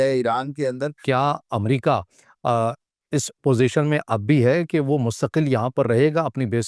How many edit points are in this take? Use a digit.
1